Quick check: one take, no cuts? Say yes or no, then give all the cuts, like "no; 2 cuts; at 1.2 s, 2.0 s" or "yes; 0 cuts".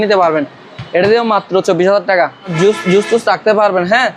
no; 1 cut; at 2.5 s